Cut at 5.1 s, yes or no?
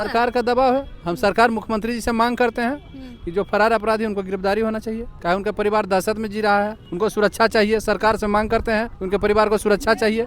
yes